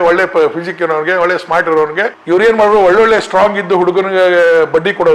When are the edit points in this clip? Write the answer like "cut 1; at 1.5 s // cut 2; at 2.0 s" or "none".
cut 1; at 2.1 s